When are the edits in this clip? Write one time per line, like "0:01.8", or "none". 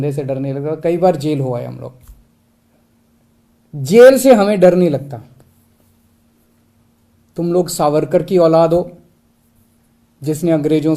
0:02.3